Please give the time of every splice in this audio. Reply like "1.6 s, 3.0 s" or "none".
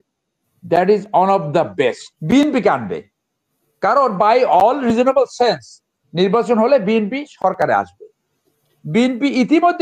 2.1 s